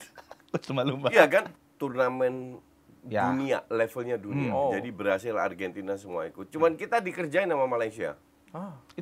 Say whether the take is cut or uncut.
cut